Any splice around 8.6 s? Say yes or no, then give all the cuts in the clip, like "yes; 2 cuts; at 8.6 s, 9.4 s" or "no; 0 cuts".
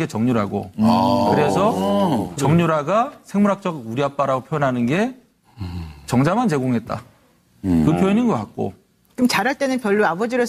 no; 1 cut; at 1.6 s